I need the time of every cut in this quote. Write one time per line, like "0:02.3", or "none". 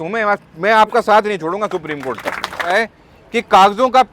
0:02.9